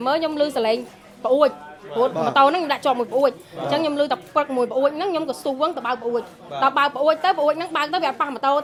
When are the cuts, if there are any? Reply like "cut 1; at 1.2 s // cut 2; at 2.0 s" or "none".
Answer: none

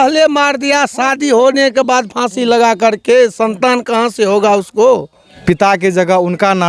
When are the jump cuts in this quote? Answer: cut 1; at 5.3 s

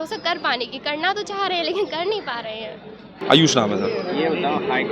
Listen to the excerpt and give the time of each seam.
none

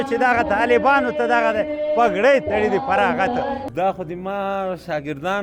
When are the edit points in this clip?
cut 1; at 3.6 s

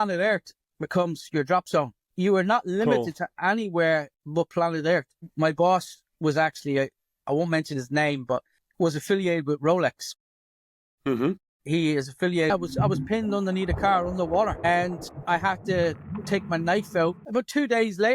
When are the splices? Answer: cut 1; at 2.0 s // cut 2; at 5.2 s // cut 3; at 8.6 s // cut 4; at 12.5 s // cut 5; at 17.2 s

